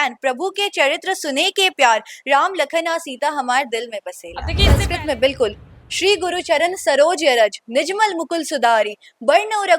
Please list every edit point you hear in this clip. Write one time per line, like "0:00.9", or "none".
0:04.8

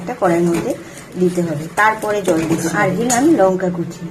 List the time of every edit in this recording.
0:02.7

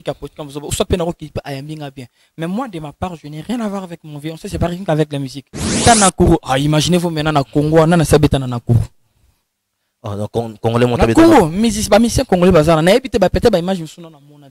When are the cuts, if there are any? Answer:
0:05.7

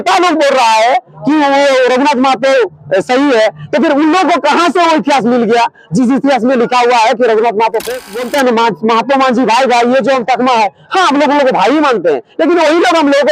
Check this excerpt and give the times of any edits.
0:08.2

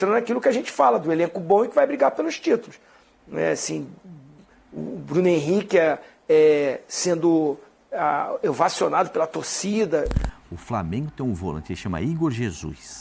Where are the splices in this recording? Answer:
0:10.3

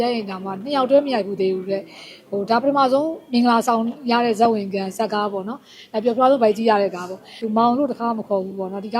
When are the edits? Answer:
0:07.4

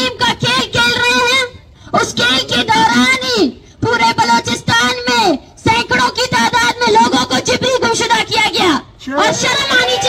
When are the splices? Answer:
none

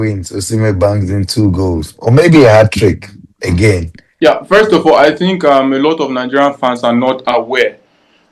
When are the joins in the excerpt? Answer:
0:04.0

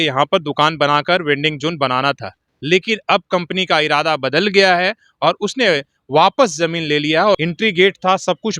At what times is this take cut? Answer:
0:07.4

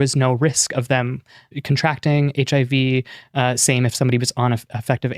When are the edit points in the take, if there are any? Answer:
0:01.5

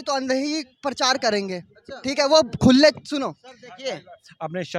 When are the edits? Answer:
none

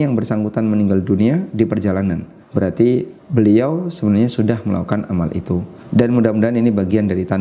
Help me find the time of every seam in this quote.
0:02.3
0:03.2
0:05.8

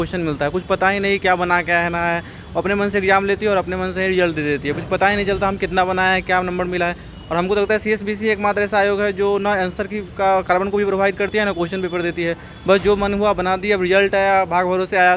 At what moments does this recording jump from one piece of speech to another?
none

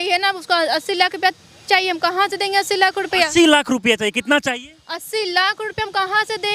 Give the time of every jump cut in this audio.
none

